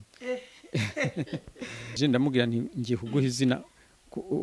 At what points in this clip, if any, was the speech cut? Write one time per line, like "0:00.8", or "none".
0:01.9